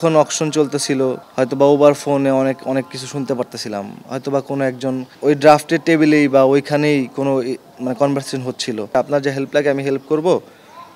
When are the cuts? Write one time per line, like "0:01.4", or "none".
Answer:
0:01.2
0:05.1
0:08.9